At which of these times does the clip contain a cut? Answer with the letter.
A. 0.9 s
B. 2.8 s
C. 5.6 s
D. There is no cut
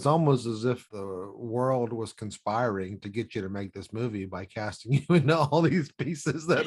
A